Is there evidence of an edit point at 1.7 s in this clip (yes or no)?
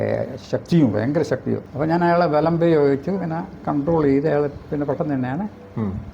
yes